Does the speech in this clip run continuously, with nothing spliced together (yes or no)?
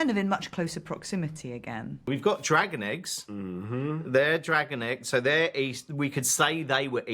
no